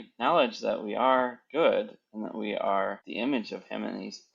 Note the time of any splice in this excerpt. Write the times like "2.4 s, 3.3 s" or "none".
3.0 s